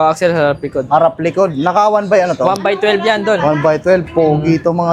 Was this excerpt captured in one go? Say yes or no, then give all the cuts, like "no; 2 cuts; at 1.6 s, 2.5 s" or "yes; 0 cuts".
yes; 0 cuts